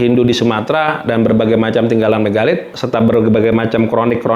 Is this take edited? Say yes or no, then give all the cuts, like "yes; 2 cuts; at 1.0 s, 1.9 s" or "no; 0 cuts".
yes; 1 cut; at 2.7 s